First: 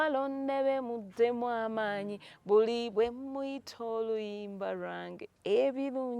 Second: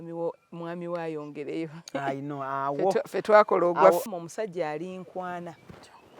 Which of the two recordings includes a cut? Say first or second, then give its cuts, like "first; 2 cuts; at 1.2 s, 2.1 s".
second; 1 cut; at 4.0 s